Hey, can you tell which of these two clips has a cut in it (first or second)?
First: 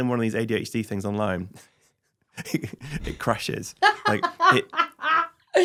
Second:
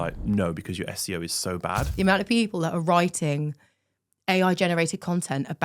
second